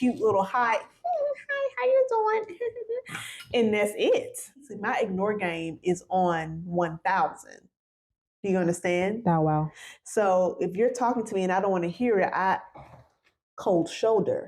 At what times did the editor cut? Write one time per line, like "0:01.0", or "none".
0:04.7